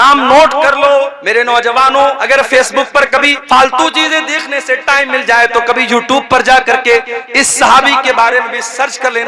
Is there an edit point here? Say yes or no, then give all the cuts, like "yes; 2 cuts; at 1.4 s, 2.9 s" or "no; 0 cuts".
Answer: yes; 3 cuts; at 1.2 s, 2.2 s, 3.4 s